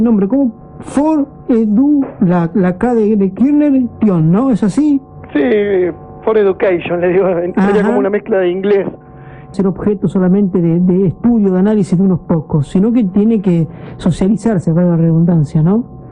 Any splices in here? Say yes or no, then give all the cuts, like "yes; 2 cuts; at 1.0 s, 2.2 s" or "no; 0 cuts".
no; 0 cuts